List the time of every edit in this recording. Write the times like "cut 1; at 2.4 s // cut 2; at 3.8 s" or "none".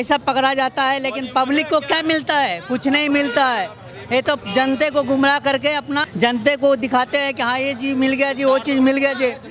cut 1; at 6.1 s